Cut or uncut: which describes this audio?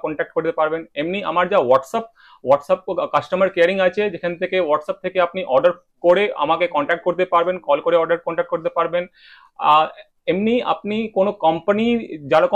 uncut